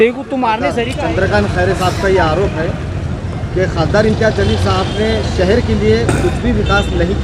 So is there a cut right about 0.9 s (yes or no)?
yes